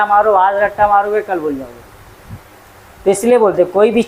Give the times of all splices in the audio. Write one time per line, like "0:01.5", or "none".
none